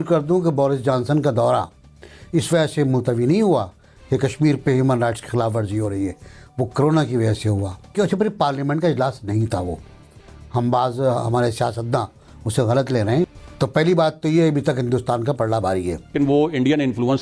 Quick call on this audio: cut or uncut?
cut